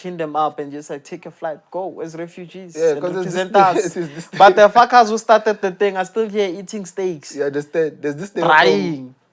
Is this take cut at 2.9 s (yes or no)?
no